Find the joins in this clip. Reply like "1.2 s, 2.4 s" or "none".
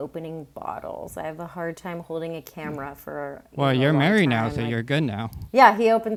none